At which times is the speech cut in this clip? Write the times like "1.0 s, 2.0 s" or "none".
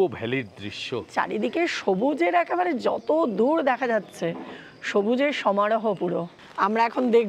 1.1 s, 6.4 s

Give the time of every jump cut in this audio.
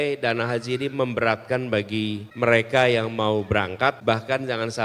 2.3 s, 4.0 s

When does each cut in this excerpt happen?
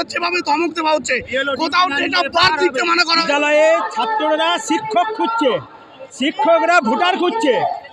3.2 s

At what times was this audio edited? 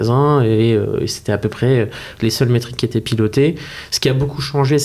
none

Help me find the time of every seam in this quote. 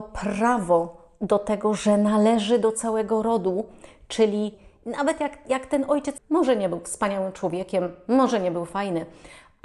4.6 s, 6.1 s

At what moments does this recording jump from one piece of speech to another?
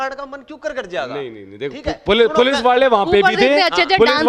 none

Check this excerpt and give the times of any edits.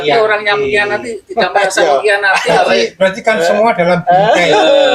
none

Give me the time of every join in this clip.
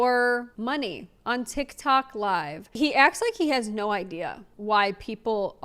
2.6 s

